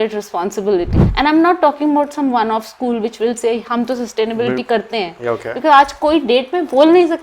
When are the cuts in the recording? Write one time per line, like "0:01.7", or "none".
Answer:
0:01.0